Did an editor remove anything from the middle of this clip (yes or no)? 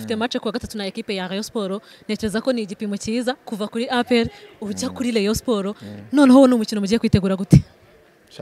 no